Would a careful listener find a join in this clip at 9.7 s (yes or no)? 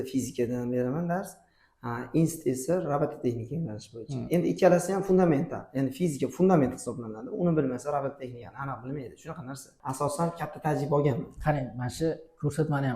yes